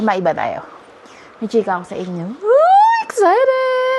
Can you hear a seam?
no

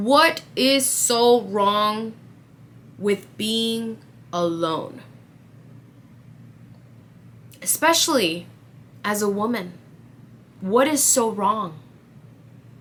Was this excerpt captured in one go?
yes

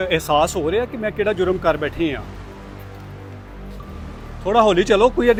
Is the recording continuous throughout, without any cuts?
yes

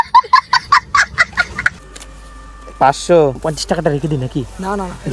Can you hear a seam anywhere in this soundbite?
yes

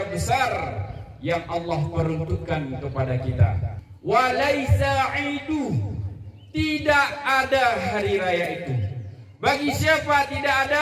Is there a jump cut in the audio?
yes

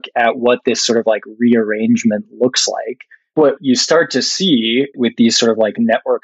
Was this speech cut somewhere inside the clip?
yes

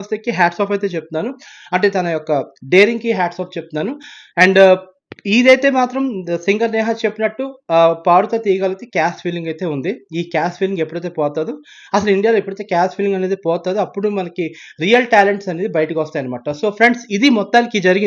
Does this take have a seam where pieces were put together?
no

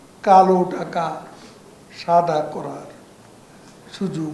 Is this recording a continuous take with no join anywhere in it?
yes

